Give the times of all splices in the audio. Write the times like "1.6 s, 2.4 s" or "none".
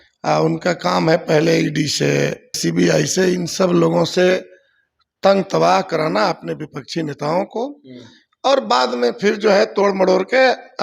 2.6 s